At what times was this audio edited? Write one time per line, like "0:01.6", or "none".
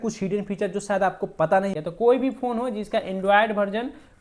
0:01.8